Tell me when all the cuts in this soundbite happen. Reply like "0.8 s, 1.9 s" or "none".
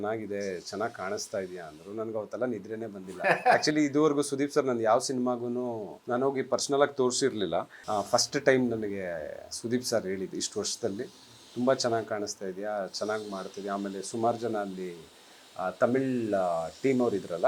5.9 s, 7.8 s